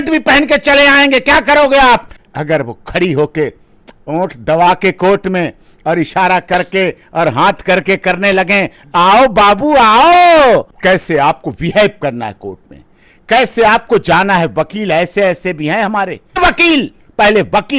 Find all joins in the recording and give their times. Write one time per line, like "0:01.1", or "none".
0:02.1
0:10.7
0:16.4